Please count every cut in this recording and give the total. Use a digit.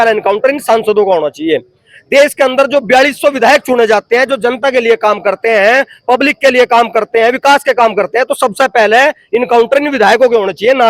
0